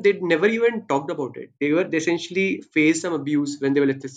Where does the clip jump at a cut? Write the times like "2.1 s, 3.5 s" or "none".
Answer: none